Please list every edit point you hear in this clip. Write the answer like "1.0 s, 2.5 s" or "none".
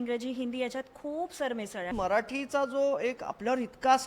1.9 s